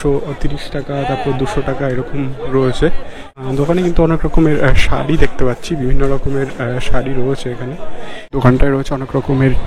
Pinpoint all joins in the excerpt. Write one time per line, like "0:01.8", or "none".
0:03.3
0:08.3